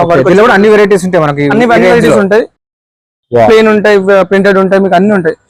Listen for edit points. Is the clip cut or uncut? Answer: uncut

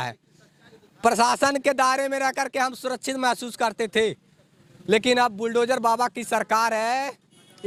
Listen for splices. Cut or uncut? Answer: uncut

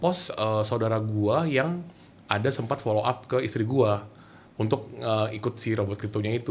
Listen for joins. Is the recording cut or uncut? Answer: uncut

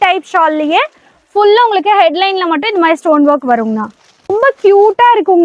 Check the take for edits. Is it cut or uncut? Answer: cut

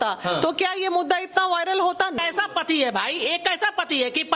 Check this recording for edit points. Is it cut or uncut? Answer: cut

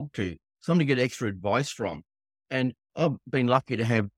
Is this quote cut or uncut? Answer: uncut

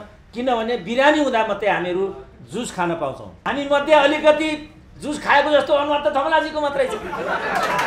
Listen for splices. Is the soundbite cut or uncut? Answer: cut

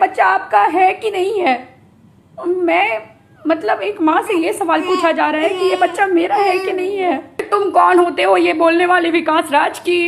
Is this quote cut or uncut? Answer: cut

